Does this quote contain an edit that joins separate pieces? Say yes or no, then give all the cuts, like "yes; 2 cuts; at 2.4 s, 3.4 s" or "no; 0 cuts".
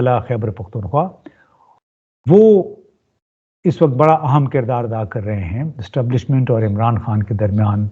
no; 0 cuts